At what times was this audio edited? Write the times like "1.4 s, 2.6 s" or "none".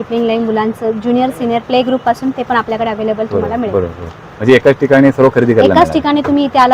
none